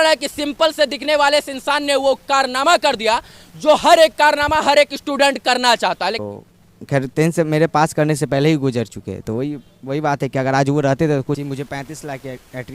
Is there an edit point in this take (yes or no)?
yes